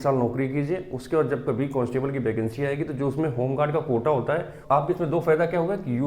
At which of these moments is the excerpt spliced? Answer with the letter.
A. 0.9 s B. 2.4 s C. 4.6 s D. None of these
C